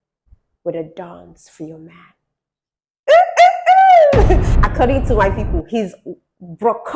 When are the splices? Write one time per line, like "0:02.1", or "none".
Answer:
0:04.5